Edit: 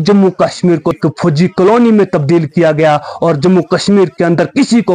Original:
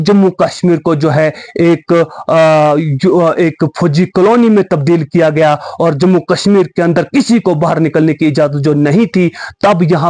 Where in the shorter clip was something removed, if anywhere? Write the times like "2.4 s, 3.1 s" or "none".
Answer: 1.0 s